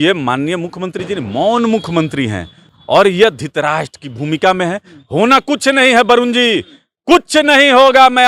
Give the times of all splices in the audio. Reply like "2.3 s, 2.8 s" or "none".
none